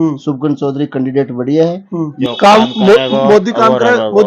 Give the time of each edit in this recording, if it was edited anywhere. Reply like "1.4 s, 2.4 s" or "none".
2.3 s